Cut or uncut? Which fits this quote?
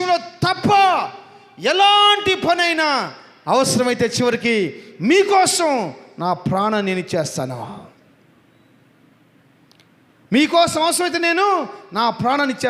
uncut